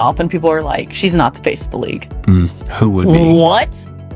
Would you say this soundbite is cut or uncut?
cut